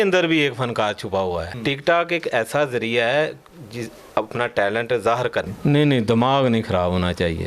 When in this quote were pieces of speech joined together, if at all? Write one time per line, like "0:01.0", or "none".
0:01.5
0:05.5